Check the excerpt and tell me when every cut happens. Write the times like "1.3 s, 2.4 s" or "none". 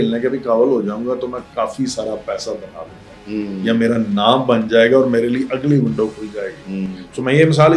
none